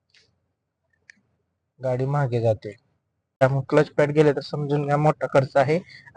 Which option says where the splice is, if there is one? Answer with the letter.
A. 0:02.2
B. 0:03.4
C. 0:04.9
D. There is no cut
B